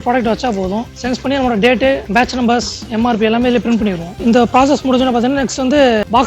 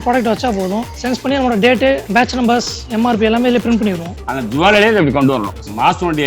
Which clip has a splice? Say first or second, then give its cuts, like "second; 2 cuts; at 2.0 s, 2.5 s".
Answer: second; 1 cut; at 4.1 s